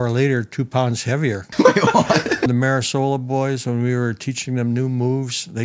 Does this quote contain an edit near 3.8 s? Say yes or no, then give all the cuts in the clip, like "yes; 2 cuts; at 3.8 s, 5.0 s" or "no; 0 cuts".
no; 2 cuts; at 1.4 s, 2.5 s